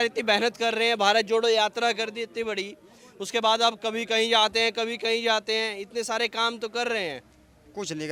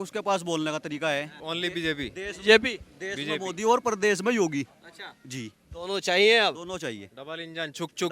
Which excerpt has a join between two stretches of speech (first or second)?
second